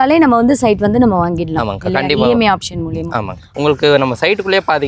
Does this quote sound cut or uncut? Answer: cut